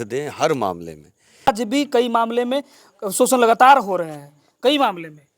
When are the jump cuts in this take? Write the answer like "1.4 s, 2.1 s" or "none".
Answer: 1.5 s